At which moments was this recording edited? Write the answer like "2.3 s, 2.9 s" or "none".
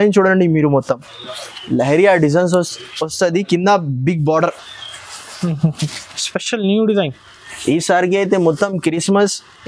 none